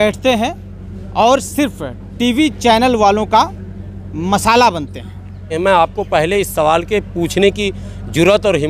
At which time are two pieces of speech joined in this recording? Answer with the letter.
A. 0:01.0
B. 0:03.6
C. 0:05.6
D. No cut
C